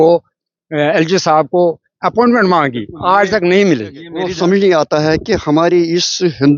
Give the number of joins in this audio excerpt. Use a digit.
1